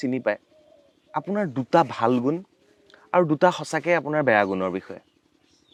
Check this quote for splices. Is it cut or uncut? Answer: uncut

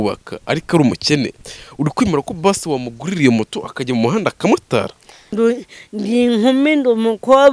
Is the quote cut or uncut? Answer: cut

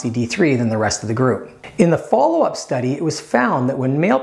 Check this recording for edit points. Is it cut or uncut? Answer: cut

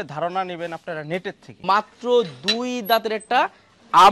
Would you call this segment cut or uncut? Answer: cut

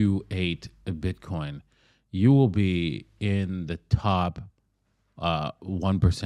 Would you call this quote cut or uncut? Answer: uncut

